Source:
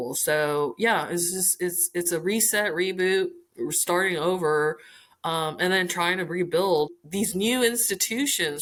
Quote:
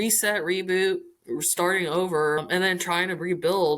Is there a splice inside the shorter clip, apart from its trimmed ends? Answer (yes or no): yes